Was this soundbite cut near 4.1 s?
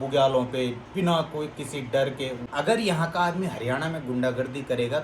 no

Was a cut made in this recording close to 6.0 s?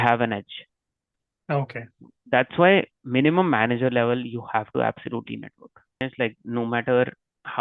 yes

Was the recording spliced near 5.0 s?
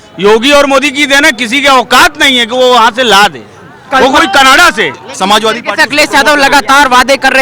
yes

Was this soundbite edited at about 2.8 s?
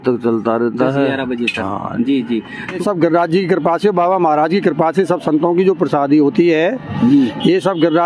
yes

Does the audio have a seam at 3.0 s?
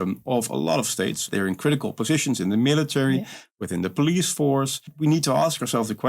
no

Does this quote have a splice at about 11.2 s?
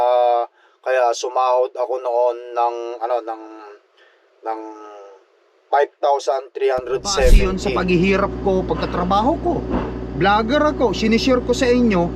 no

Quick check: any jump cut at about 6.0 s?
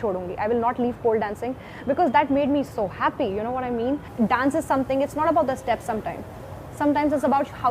no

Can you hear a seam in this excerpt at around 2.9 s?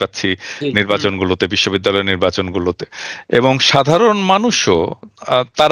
no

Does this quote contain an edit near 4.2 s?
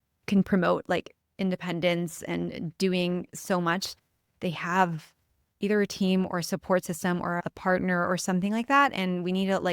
no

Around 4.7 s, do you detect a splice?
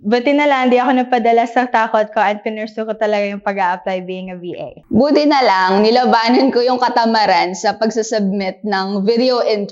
yes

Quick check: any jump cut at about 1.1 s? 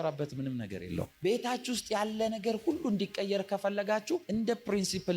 yes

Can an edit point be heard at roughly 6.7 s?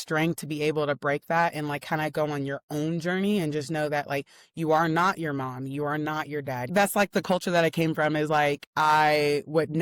yes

